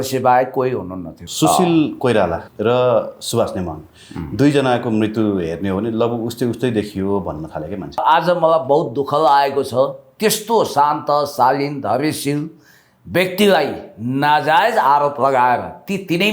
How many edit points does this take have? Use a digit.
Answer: 3